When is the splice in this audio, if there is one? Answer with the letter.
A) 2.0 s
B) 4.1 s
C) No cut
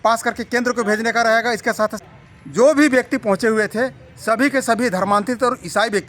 A